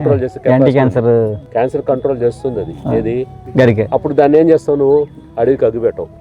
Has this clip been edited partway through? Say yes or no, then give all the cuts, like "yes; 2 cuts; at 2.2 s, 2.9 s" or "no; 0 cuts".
yes; 3 cuts; at 1.4 s, 3.4 s, 5.2 s